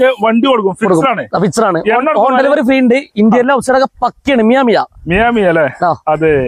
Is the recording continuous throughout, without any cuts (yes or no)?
yes